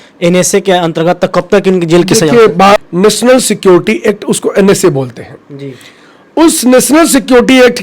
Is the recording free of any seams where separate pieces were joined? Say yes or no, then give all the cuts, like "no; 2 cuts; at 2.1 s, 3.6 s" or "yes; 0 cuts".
no; 1 cut; at 2.8 s